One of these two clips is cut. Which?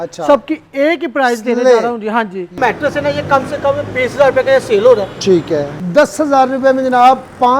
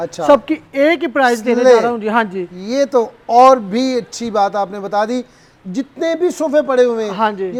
first; 2 cuts; at 2.5 s, 5.8 s

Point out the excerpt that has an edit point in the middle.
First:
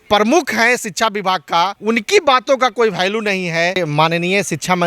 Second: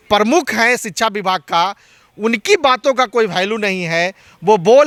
first; 2 cuts; at 1.8 s, 3.8 s

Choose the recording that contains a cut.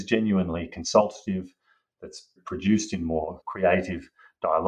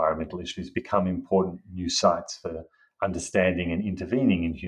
first; 2 cuts; at 2.4 s, 3.4 s

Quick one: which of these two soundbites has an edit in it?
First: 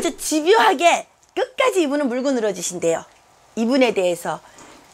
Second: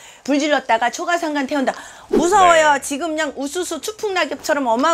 second; 1 cut; at 2.0 s

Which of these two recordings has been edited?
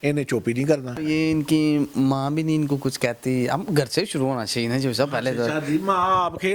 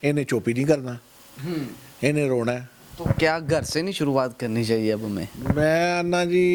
first; 1 cut; at 1.0 s

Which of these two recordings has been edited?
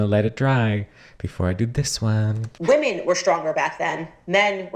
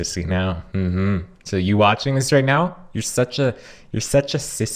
first; 1 cut; at 2.4 s

